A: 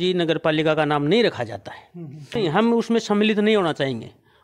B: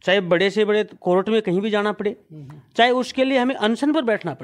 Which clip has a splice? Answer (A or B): A